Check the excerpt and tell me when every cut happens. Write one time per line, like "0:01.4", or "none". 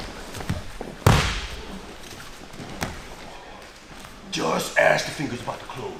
none